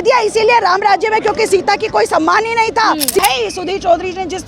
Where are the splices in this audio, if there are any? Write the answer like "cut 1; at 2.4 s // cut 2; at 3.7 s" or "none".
cut 1; at 3.2 s